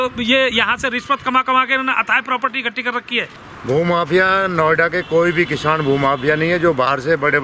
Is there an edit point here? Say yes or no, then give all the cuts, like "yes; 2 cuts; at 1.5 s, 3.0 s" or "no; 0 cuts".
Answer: yes; 1 cut; at 3.5 s